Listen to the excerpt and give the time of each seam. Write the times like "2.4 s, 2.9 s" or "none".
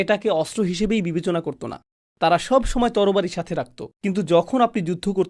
1.8 s